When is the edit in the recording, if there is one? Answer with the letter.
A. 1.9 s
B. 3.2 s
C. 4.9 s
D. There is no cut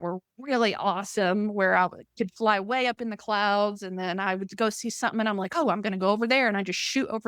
D